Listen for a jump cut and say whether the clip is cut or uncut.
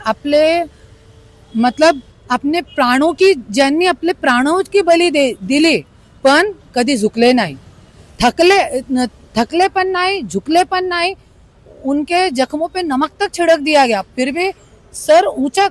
uncut